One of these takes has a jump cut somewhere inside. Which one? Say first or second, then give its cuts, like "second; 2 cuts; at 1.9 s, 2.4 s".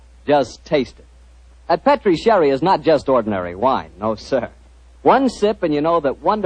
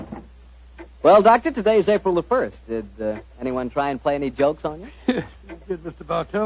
first; 1 cut; at 1.9 s